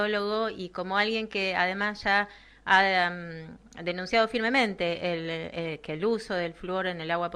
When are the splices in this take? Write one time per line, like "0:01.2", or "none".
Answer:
none